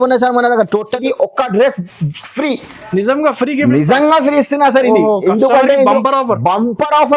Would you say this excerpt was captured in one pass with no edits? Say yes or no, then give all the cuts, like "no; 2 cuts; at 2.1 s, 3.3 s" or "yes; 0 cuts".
no; 1 cut; at 1.0 s